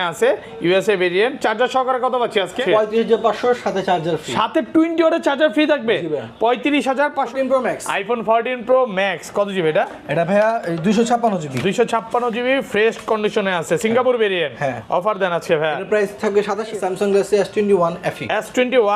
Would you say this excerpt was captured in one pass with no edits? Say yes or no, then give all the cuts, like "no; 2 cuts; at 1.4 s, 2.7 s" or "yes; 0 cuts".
no; 2 cuts; at 7.3 s, 16.7 s